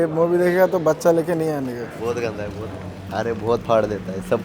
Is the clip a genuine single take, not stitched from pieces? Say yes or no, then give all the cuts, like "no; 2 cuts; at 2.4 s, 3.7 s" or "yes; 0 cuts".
no; 2 cuts; at 1.9 s, 3.0 s